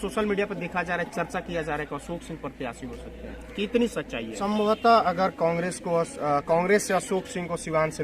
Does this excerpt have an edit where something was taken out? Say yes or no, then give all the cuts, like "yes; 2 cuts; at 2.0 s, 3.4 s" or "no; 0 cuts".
yes; 1 cut; at 4.4 s